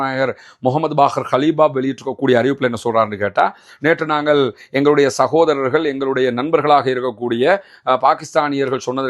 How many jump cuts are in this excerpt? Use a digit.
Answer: 0